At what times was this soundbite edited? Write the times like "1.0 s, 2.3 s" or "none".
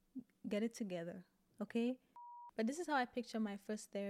2.2 s